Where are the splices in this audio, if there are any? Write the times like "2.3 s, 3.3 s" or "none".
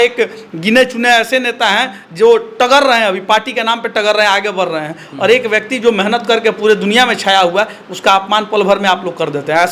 none